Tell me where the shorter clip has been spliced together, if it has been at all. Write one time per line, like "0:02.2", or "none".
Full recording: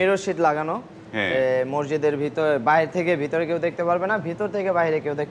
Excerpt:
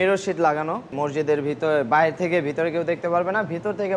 0:00.9